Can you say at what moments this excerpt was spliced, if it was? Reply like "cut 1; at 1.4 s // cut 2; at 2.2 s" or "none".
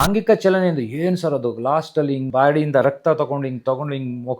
cut 1; at 2.3 s